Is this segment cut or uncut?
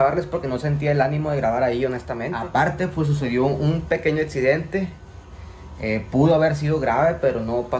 cut